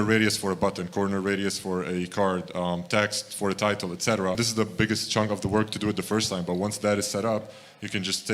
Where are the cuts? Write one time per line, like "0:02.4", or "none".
0:04.4